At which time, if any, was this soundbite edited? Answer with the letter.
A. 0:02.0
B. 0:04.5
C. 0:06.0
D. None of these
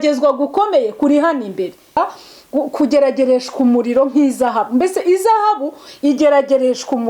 A